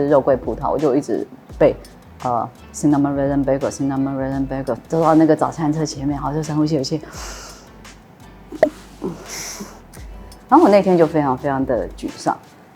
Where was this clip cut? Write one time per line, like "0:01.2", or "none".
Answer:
0:04.8
0:10.3